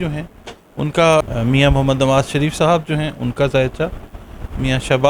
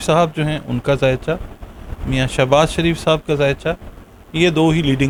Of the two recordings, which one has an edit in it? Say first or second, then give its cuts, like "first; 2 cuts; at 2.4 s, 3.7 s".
first; 1 cut; at 1.2 s